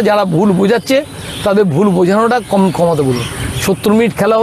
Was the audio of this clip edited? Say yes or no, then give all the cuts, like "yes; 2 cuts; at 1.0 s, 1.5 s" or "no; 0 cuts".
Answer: no; 0 cuts